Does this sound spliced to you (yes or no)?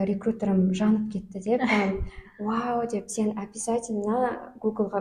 no